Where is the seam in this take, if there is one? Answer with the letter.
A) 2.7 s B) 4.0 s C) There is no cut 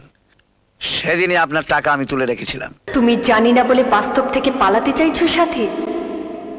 A